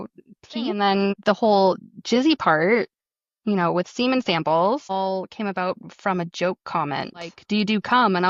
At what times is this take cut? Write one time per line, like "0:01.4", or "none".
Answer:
0:00.7
0:07.4